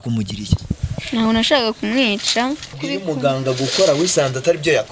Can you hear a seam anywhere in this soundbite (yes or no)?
yes